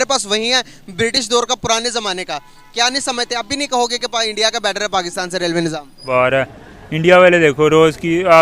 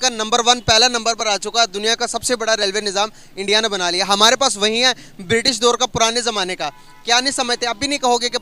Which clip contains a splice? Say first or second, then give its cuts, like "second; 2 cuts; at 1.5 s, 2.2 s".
first; 1 cut; at 6.1 s